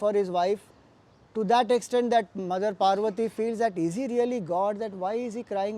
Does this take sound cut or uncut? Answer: uncut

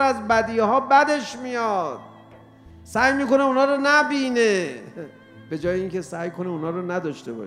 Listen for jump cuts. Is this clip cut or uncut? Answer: uncut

